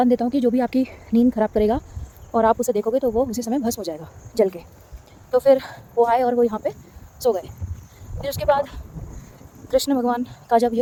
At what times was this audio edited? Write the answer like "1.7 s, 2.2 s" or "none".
none